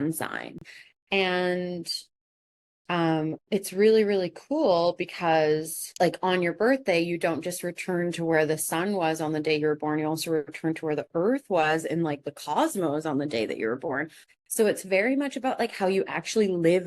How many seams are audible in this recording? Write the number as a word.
two